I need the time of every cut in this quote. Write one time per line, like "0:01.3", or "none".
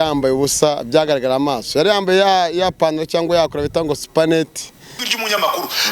0:05.0